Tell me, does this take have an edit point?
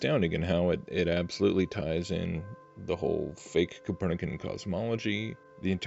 no; 0 cuts

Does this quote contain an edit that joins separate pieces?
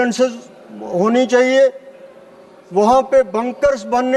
no; 0 cuts

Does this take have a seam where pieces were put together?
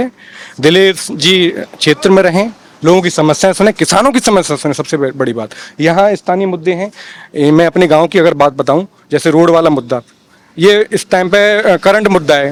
no; 0 cuts

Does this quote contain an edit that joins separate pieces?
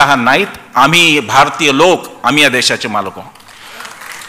no; 0 cuts

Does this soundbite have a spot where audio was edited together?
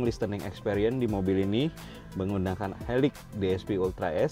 no; 0 cuts

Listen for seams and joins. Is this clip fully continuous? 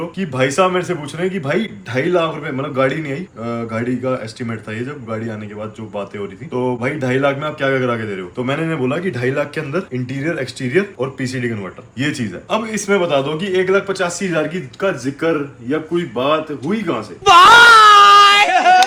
yes; 0 cuts

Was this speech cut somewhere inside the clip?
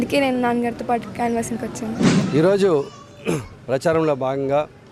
no; 0 cuts

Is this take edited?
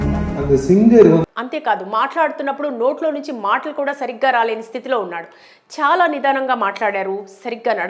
no; 0 cuts

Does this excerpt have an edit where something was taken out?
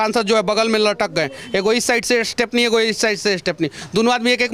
no; 0 cuts

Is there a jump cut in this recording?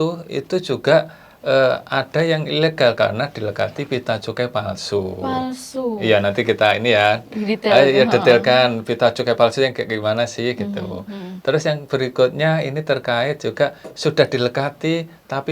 no; 0 cuts

